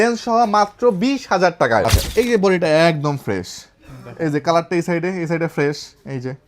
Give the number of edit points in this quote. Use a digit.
1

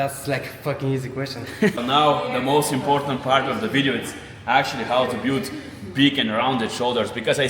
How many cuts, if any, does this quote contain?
1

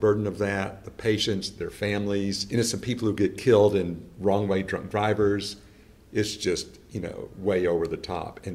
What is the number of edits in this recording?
1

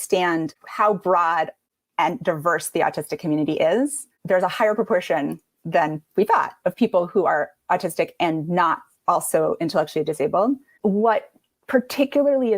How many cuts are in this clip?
1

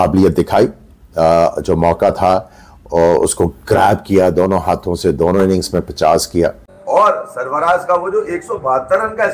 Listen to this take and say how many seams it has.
1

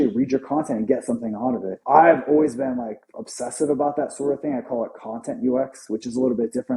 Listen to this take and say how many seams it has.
1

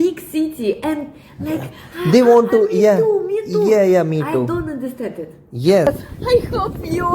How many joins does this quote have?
1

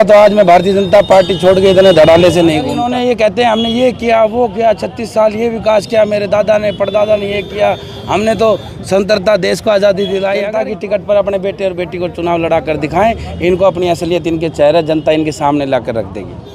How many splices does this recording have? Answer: 2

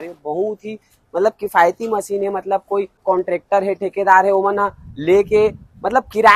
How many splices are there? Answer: 1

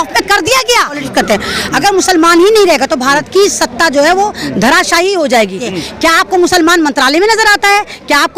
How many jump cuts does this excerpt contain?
2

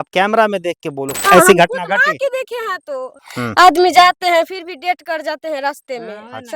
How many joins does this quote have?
2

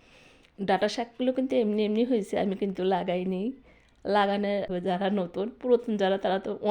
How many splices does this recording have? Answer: 1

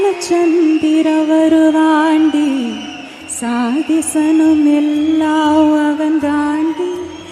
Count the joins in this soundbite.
0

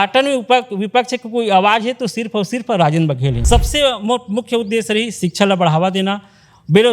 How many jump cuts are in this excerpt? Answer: 1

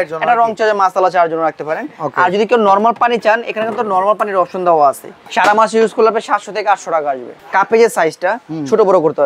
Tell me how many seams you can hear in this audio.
2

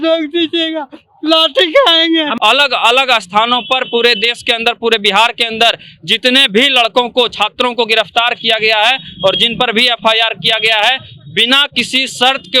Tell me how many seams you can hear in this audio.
1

